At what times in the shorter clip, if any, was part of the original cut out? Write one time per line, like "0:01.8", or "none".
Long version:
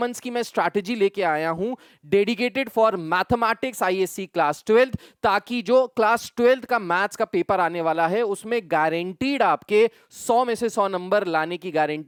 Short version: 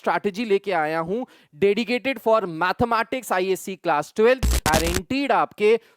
0:04.7

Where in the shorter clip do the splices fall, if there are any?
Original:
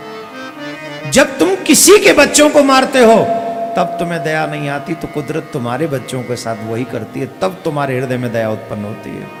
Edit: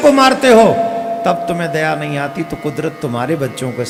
none

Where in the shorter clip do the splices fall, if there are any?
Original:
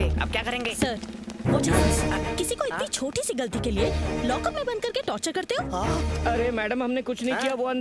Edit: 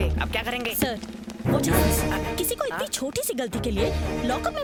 none

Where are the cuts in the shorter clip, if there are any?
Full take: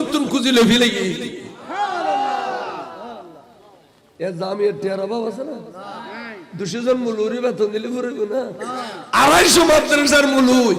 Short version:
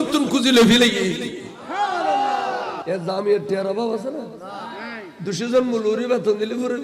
0:02.8

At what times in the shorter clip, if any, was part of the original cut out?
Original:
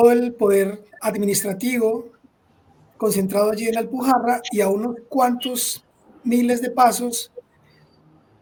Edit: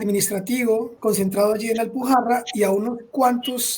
0:00.9

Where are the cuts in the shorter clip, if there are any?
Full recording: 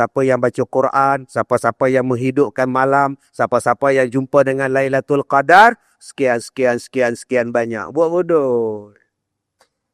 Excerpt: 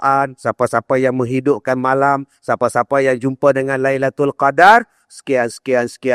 none

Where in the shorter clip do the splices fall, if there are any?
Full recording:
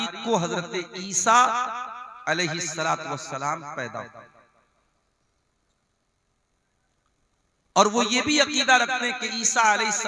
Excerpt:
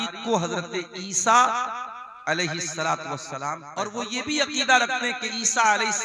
0:03.9

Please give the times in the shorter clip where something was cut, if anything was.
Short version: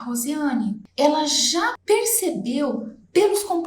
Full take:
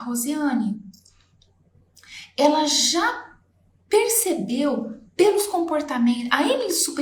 0:00.8
0:01.8

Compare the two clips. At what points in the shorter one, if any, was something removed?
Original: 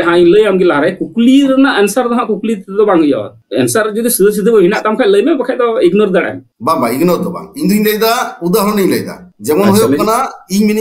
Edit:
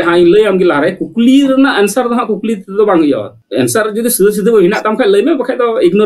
none

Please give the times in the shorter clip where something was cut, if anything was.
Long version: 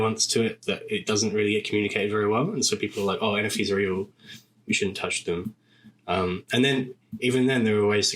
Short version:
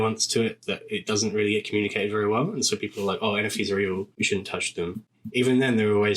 0:04.1
0:05.2

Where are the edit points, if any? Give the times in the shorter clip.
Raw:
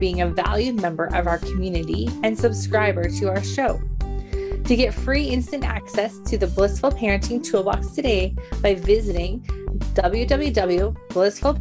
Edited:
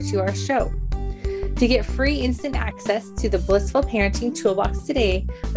none

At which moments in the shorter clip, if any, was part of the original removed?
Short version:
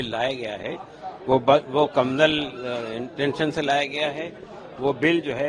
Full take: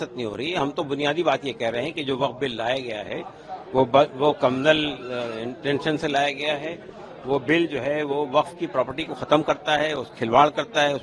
none

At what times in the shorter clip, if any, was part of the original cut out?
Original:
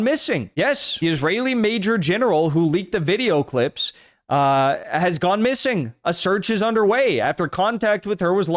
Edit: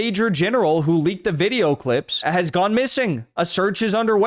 0:02.2

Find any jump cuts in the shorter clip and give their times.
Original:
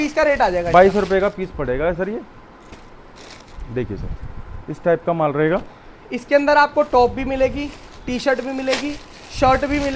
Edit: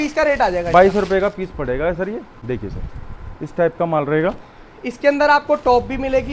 0:02.3

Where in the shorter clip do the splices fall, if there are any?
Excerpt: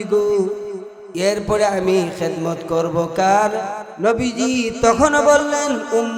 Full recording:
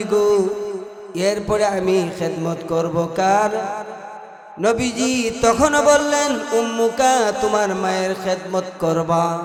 0:03.8

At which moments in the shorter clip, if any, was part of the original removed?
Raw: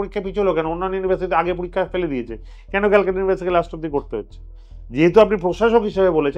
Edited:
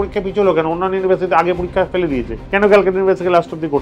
0:02.4

